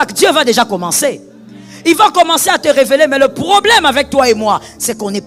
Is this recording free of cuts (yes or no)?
yes